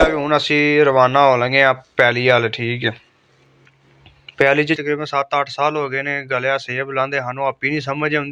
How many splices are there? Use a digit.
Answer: 1